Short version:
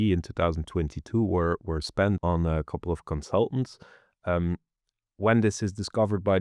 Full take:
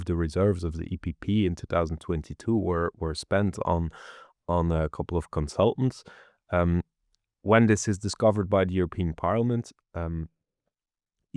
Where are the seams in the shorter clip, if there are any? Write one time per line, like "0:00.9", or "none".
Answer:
0:02.2